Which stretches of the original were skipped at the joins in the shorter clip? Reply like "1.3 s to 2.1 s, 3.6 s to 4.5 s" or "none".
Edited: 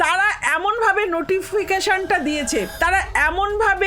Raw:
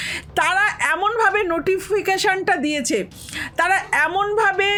3.1 s to 3.5 s